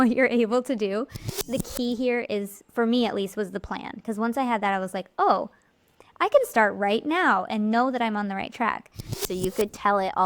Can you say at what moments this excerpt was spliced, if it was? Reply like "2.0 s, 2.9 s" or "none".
1.4 s, 9.2 s